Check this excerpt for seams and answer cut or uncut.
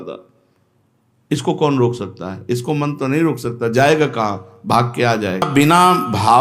cut